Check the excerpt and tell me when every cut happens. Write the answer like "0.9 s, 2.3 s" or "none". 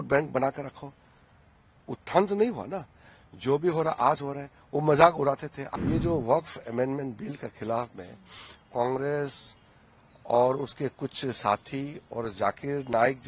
5.6 s